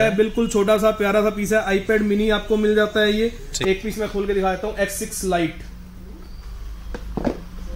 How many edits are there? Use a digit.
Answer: 1